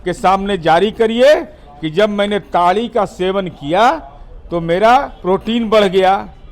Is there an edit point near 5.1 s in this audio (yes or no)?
yes